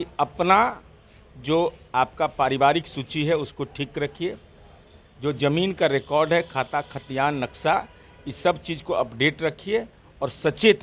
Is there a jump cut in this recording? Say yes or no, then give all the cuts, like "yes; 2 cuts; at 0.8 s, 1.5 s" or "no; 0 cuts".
no; 0 cuts